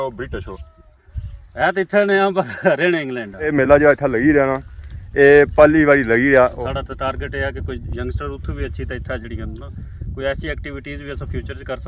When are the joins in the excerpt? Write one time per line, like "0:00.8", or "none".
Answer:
0:03.5
0:06.6